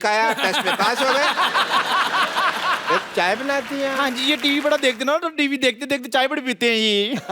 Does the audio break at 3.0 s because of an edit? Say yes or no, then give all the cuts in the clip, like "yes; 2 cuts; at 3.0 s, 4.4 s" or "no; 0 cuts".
yes; 1 cut; at 3.0 s